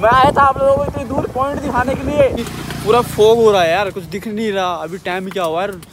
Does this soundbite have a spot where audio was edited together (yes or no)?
yes